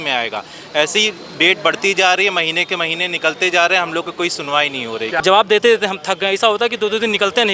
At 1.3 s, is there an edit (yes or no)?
no